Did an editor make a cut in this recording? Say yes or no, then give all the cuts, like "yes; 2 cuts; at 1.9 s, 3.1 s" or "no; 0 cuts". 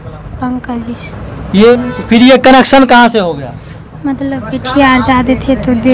yes; 1 cut; at 1.7 s